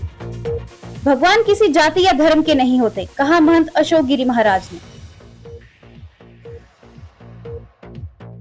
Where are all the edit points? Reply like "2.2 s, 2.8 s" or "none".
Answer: 0.9 s, 4.8 s